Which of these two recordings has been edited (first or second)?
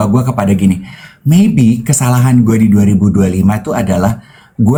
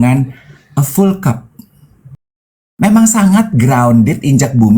second